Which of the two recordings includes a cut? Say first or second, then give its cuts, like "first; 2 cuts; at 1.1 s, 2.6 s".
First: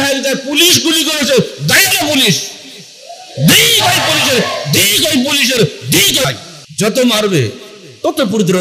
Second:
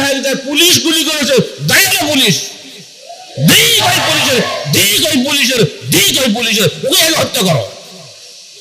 first; 1 cut; at 6.2 s